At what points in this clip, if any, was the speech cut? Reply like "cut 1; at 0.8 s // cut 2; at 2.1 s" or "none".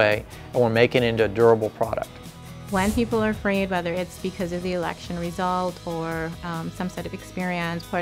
cut 1; at 2.3 s